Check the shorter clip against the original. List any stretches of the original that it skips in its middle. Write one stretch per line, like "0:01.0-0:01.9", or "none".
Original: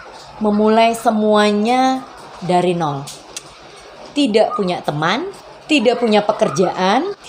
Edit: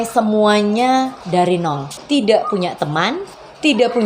0:02.1-0:02.3
0:03.1-0:04.0